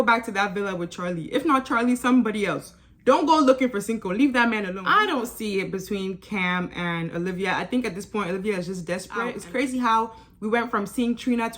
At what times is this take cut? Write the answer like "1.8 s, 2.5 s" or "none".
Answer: 4.7 s, 9.4 s